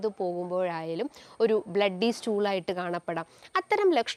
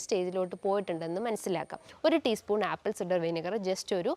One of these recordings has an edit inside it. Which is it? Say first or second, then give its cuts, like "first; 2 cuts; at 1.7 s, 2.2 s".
second; 1 cut; at 1.9 s